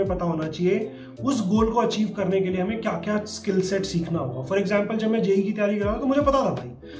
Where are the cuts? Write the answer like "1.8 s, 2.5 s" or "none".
none